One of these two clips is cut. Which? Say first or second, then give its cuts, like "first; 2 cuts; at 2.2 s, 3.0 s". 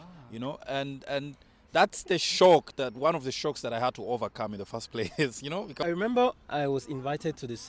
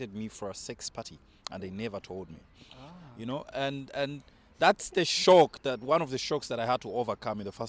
first; 1 cut; at 5.8 s